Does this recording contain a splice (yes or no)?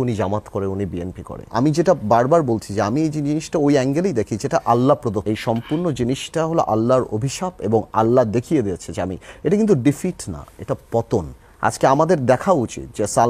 yes